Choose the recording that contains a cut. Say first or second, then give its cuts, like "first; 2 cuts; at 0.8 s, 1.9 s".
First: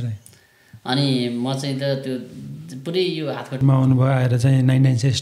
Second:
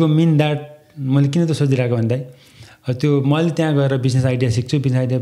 first; 1 cut; at 3.6 s